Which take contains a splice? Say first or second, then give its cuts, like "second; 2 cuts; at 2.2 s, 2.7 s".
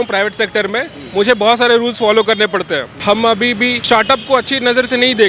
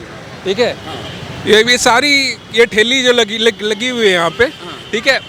first; 2 cuts; at 2.9 s, 3.8 s